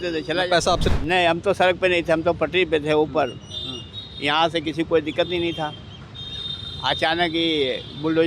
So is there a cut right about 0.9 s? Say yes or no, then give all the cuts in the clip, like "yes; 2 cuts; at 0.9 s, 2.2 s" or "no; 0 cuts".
yes; 1 cut; at 0.9 s